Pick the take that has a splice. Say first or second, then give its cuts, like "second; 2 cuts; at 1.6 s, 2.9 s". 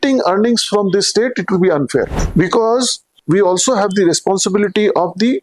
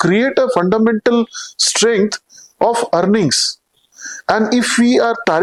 first; 2 cuts; at 2.2 s, 3.2 s